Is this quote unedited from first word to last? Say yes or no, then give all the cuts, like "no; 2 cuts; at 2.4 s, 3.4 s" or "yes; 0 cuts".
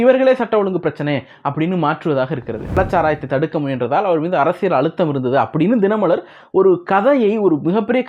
no; 1 cut; at 2.8 s